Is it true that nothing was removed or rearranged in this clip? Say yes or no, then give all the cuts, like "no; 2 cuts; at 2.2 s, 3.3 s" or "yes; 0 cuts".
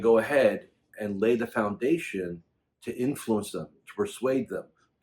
no; 1 cut; at 1.1 s